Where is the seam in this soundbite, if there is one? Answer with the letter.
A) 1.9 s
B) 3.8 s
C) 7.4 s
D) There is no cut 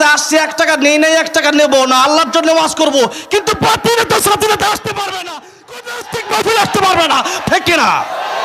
C